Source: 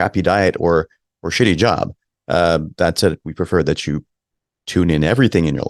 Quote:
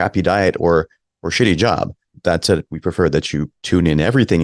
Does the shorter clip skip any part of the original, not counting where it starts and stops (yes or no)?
yes